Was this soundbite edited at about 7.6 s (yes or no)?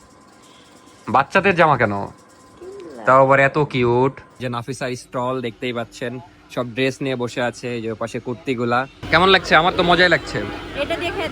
no